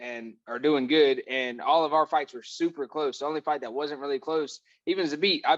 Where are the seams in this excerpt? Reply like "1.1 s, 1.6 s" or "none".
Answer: none